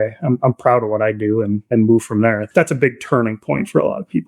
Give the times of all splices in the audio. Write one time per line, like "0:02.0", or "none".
0:01.6
0:02.4